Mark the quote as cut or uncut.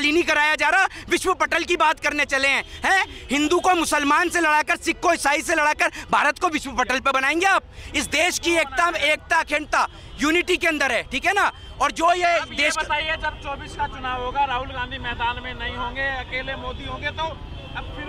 uncut